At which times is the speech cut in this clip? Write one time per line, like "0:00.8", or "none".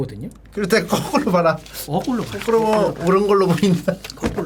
none